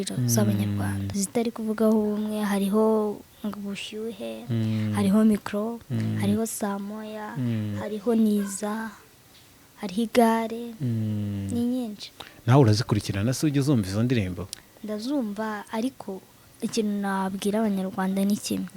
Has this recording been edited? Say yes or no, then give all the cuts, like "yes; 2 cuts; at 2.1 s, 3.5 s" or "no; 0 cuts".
yes; 1 cut; at 1.0 s